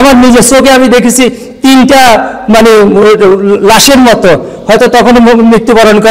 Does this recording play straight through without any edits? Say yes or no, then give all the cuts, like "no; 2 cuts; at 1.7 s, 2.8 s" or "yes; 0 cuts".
yes; 0 cuts